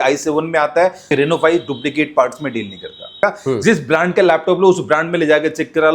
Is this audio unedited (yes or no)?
no